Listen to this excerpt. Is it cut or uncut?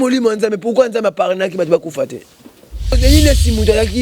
cut